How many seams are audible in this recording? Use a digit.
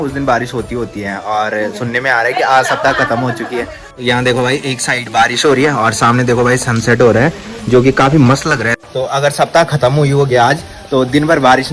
2